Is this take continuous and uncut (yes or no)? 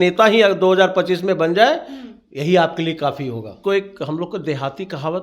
no